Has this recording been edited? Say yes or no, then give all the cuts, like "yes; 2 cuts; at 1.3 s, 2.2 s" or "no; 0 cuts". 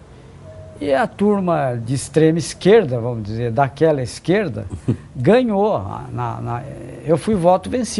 no; 0 cuts